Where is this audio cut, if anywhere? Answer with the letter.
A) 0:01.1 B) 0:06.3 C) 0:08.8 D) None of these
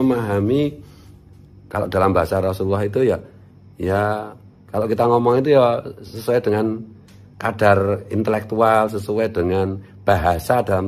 D